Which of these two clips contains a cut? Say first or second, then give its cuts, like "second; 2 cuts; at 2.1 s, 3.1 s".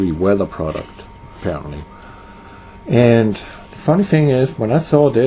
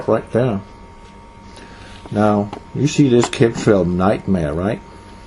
first; 1 cut; at 3.3 s